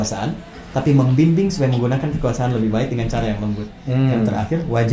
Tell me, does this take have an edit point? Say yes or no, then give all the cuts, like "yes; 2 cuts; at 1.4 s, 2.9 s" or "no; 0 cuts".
no; 0 cuts